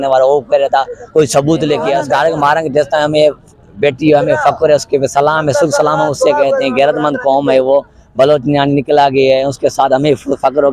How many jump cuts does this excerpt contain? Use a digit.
1